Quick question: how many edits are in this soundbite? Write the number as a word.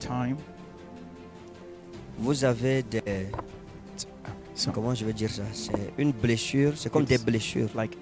zero